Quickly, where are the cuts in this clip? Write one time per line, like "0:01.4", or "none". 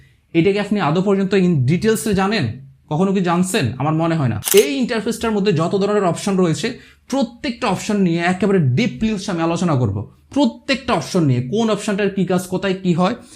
0:04.4